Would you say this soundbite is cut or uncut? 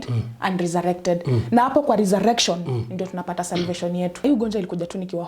cut